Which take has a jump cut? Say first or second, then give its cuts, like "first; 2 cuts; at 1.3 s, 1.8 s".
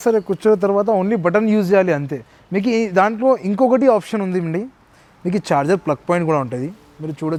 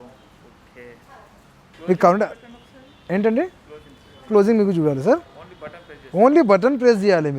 second; 1 cut; at 1.7 s